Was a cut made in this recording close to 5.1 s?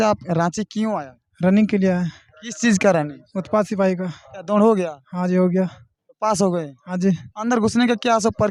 no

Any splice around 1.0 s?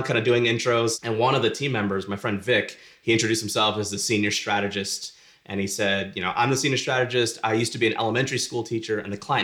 yes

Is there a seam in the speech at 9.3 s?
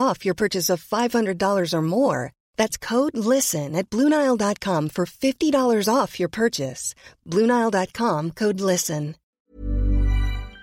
yes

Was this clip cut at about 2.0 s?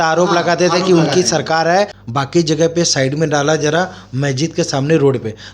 yes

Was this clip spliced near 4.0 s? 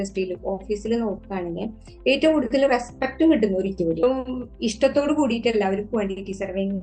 yes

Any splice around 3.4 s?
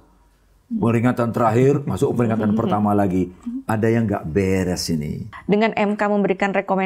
no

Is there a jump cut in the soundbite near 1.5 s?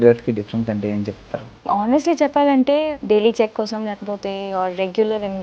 yes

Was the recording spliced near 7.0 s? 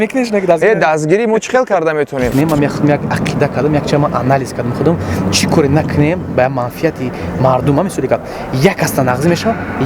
no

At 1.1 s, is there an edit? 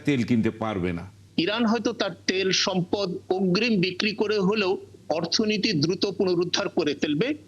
yes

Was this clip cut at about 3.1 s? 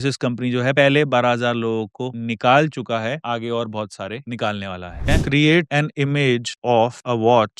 no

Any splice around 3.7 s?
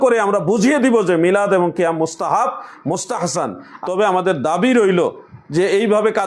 yes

